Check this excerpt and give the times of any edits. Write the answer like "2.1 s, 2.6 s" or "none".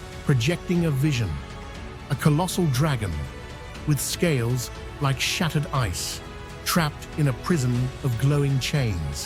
none